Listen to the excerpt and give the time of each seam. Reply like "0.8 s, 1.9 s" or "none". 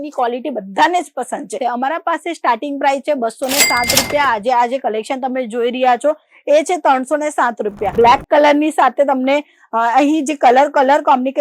1.6 s, 7.9 s

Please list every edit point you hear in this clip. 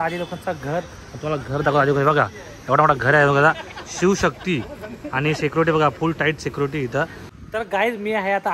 7.2 s

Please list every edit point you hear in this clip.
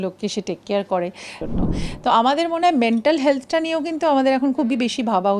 1.4 s

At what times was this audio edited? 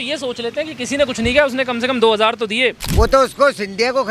2.9 s

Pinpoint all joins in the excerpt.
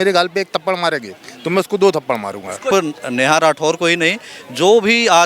2.7 s

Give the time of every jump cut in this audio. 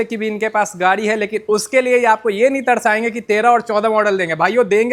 none

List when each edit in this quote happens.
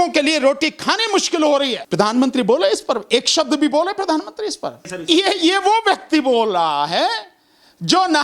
1.8 s, 4.9 s

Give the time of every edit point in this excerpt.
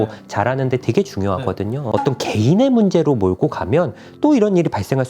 1.9 s

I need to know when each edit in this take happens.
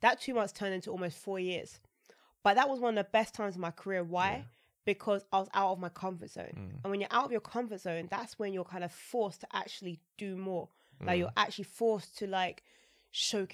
none

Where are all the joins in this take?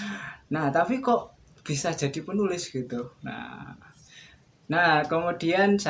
none

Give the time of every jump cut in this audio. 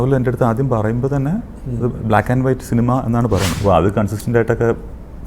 3.5 s

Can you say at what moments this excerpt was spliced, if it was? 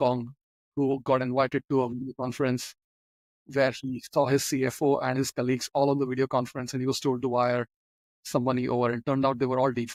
none

